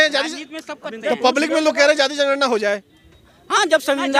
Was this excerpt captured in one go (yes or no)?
yes